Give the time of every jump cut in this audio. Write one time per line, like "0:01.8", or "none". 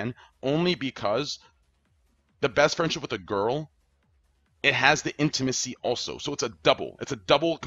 none